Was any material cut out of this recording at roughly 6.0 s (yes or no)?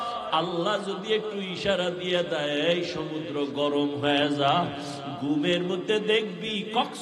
no